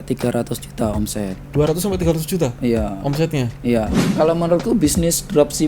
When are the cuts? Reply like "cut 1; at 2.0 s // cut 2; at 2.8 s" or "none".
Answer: cut 1; at 4.0 s

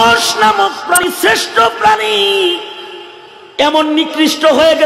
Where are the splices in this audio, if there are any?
cut 1; at 1.0 s

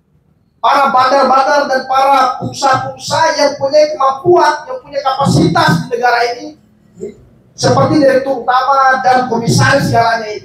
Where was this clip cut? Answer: none

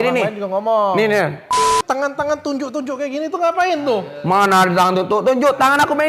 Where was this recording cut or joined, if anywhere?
cut 1; at 1.6 s

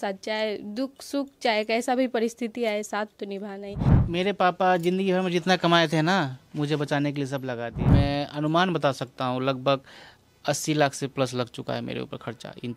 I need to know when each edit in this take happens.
cut 1; at 4.0 s // cut 2; at 7.9 s

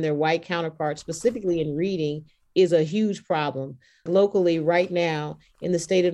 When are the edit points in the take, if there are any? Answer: cut 1; at 4.1 s

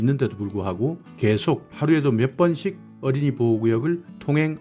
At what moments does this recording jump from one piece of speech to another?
none

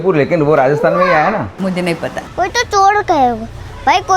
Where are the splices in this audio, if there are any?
cut 1; at 2.2 s

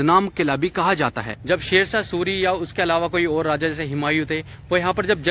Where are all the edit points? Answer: cut 1; at 1.3 s

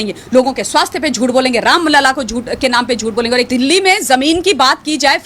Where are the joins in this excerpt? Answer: cut 1; at 3.5 s

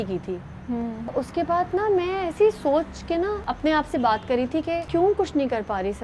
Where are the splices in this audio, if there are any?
cut 1; at 1.2 s // cut 2; at 3.5 s // cut 3; at 4.9 s

